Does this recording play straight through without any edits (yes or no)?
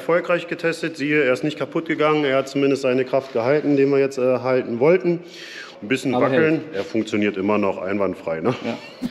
yes